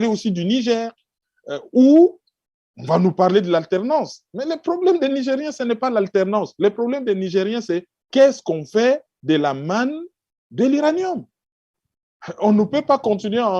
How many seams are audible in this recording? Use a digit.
0